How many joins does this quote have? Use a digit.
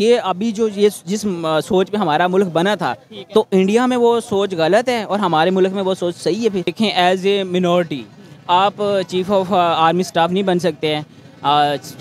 1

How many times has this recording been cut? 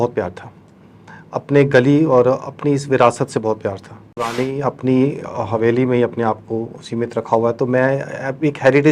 1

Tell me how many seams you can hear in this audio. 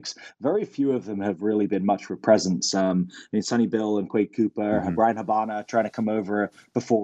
0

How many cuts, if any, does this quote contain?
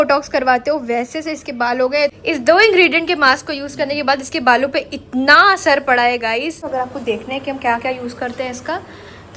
2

